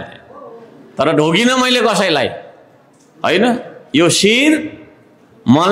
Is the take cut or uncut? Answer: uncut